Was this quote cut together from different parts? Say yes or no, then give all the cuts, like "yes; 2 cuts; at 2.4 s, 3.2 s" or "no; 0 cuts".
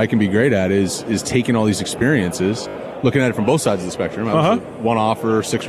no; 0 cuts